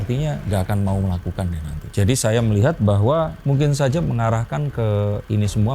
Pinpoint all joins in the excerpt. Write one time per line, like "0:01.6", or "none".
0:03.4